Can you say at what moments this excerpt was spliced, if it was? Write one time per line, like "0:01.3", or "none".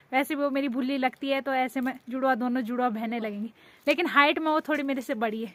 none